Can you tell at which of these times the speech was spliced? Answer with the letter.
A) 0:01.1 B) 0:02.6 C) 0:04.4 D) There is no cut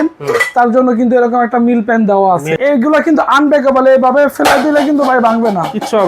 B